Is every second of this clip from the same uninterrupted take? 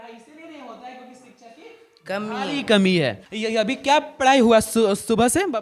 yes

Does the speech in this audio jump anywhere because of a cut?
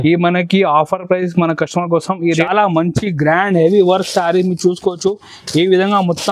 yes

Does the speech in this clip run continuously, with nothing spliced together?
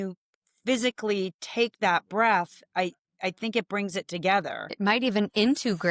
no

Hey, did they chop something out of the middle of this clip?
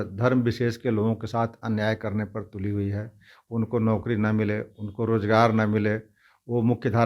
no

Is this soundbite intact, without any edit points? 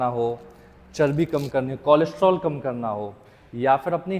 yes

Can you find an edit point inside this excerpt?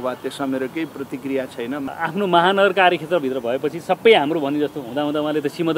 yes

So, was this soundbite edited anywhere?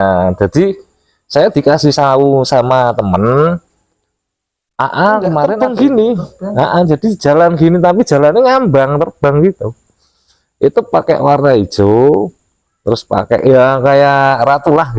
yes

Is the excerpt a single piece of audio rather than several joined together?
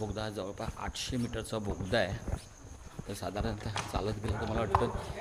yes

